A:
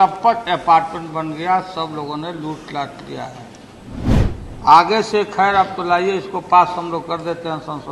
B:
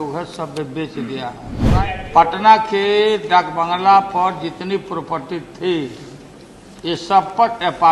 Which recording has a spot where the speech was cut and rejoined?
B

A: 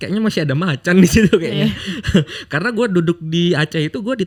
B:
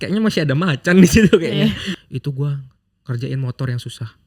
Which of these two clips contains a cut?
B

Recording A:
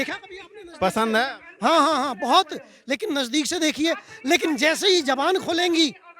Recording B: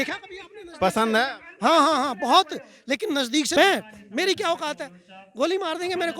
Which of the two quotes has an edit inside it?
B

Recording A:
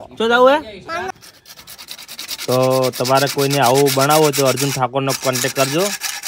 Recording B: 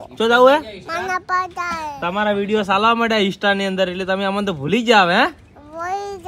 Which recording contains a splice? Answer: A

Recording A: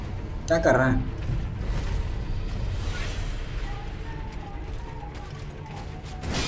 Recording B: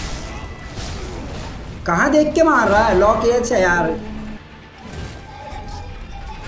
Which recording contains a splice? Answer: B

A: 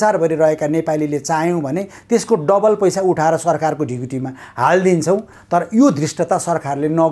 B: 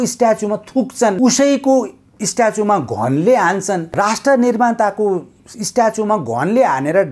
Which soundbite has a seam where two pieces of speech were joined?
B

